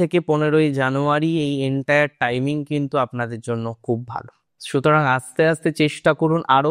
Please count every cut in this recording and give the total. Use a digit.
0